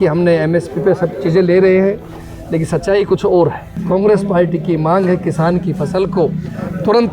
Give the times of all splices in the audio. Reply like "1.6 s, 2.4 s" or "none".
3.7 s